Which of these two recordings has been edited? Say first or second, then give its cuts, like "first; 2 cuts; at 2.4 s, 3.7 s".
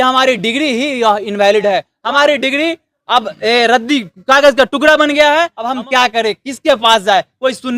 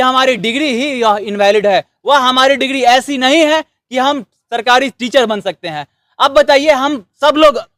first; 2 cuts; at 1.9 s, 5.6 s